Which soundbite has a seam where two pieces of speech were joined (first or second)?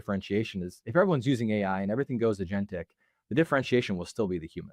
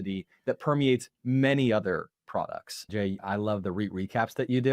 second